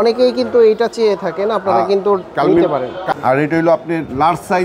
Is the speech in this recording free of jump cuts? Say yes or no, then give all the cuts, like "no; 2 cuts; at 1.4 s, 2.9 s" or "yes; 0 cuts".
no; 1 cut; at 3.1 s